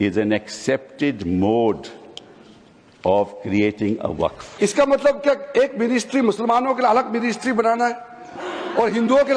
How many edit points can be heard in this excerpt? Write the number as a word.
one